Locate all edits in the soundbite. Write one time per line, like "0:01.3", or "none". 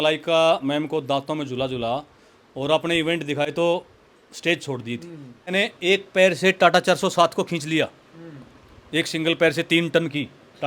0:03.5
0:05.5